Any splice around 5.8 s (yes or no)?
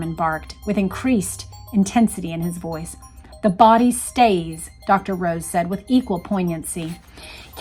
no